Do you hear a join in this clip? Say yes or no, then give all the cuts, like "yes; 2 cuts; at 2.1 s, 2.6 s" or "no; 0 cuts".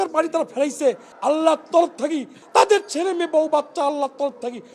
yes; 2 cuts; at 1.1 s, 2.3 s